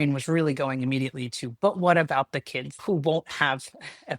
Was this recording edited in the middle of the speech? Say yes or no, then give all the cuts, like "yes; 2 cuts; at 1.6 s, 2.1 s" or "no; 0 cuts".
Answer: yes; 1 cut; at 2.8 s